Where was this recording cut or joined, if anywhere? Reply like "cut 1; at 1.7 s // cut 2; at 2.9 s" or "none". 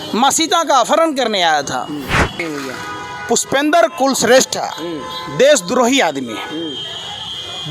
cut 1; at 2.4 s